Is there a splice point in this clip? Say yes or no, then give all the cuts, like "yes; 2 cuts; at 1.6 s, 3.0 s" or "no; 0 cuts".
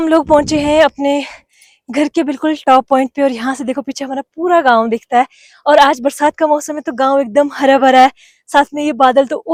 no; 0 cuts